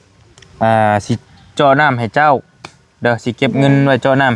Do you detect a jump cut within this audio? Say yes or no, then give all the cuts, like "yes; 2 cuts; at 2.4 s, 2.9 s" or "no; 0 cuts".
no; 0 cuts